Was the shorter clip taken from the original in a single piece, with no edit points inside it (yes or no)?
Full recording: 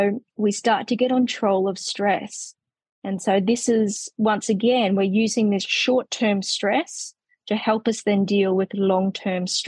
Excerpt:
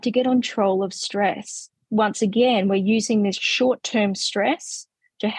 no